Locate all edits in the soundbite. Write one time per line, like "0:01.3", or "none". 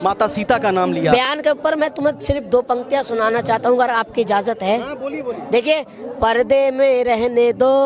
0:01.3